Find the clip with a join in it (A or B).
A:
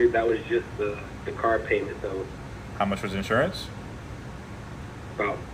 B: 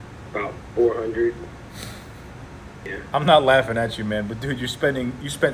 B